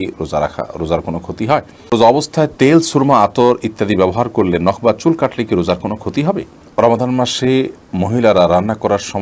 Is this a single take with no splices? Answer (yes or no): no